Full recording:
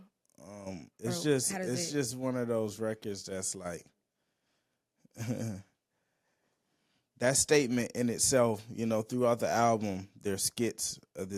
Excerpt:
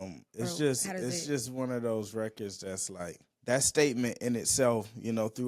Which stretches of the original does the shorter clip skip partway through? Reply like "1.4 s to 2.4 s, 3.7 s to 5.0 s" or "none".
3.9 s to 7.0 s